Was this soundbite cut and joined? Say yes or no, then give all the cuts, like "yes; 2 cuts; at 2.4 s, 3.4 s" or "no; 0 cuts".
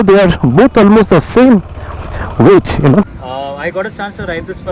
yes; 1 cut; at 3.1 s